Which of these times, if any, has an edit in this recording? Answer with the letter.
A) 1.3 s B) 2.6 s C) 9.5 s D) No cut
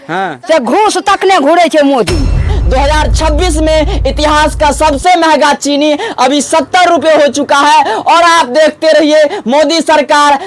B